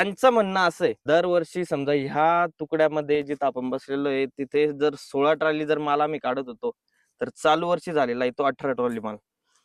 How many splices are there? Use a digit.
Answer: 1